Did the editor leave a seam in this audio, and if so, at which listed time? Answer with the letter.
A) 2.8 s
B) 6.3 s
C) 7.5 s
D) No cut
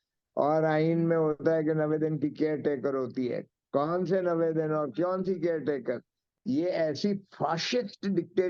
B